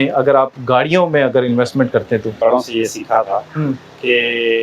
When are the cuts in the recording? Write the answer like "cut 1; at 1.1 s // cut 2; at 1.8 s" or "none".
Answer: cut 1; at 2.4 s